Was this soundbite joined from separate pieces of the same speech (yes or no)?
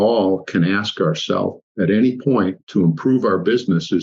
no